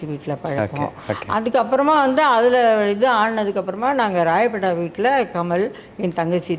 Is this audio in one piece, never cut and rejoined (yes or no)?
yes